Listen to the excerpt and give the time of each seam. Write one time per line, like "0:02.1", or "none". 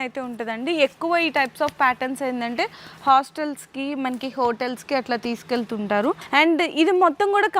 0:06.2